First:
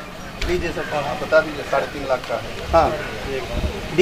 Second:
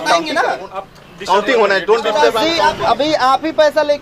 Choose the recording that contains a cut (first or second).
second